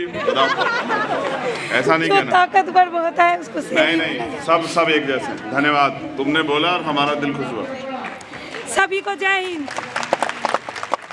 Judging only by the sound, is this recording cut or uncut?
uncut